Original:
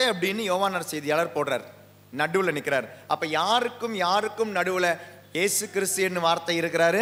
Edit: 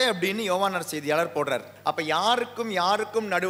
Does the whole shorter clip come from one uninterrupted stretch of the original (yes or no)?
no